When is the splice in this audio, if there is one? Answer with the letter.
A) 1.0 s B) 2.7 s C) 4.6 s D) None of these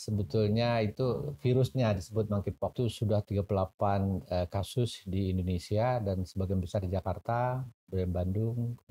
B